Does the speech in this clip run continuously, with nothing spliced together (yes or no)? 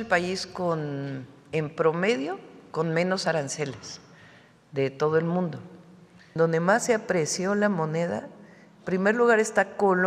no